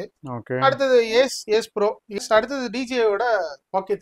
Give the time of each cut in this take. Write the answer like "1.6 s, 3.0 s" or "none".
2.2 s